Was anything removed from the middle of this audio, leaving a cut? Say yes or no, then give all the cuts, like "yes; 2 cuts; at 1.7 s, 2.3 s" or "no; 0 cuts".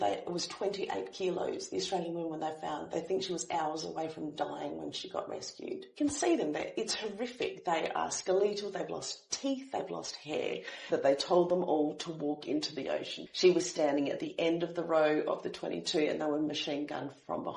yes; 3 cuts; at 5.9 s, 10.8 s, 13.2 s